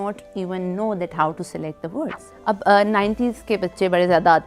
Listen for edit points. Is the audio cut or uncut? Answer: cut